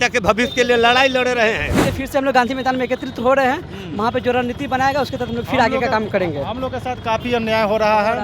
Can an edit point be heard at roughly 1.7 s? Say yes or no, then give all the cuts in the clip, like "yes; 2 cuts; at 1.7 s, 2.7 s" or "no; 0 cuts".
yes; 1 cut; at 1.7 s